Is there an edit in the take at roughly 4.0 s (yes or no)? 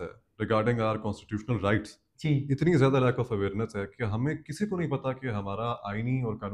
no